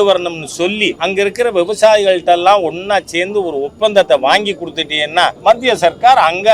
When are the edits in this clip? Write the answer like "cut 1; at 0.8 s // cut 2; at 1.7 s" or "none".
cut 1; at 1.0 s // cut 2; at 5.4 s